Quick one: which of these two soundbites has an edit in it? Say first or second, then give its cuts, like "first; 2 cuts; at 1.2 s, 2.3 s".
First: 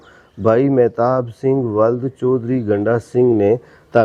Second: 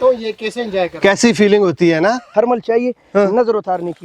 second; 1 cut; at 2.3 s